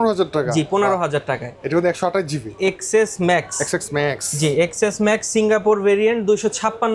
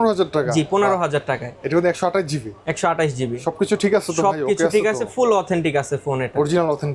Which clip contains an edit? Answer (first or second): first